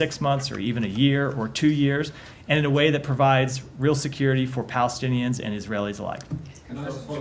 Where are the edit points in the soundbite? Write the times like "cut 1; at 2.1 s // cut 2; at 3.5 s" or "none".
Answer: none